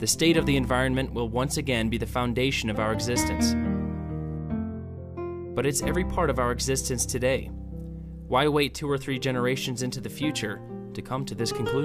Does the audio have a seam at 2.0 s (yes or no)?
yes